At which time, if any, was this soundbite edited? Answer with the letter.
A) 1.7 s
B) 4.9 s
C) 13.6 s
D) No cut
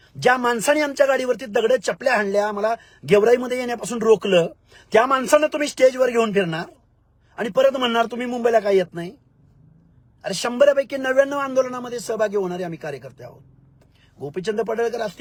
D